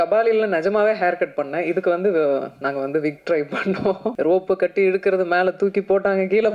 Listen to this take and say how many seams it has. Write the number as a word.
one